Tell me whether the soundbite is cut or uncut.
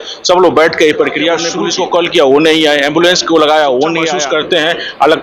cut